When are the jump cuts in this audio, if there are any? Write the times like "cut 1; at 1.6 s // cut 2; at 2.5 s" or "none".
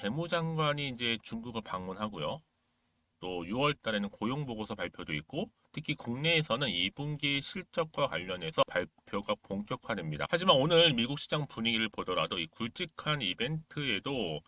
cut 1; at 8.6 s // cut 2; at 10.3 s